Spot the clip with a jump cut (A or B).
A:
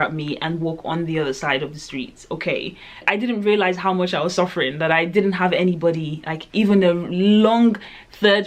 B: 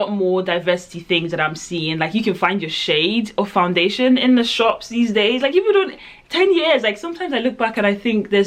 A